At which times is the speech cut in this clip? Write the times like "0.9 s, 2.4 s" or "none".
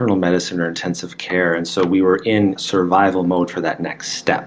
2.6 s